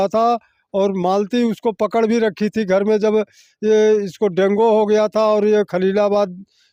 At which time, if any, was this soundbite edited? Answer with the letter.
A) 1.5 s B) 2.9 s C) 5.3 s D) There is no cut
D